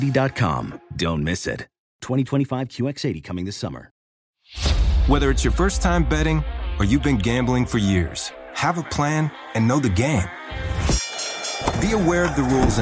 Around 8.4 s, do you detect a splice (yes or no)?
no